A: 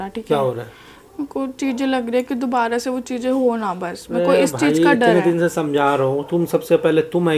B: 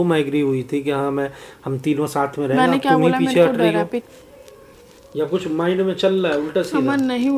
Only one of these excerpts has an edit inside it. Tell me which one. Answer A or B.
B